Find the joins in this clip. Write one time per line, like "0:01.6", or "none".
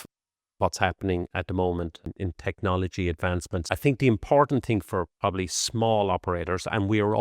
0:02.1
0:03.6